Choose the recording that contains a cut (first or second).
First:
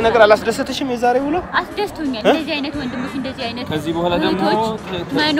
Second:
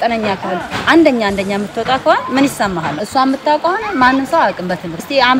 first